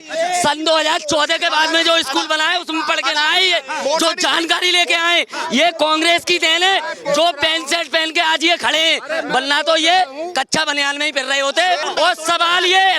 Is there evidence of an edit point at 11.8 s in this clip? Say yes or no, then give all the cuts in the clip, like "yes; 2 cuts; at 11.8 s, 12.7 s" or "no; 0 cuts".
yes; 1 cut; at 11.8 s